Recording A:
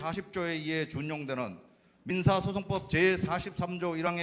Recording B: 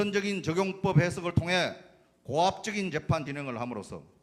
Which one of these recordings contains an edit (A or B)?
B